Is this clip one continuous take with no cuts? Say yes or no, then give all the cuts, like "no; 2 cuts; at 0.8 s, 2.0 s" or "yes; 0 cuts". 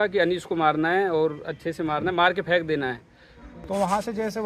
no; 1 cut; at 3.3 s